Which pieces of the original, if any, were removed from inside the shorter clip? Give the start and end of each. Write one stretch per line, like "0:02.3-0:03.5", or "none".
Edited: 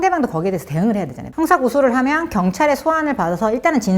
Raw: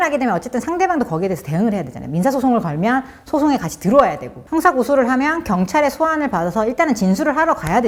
0:02.0-0:04.3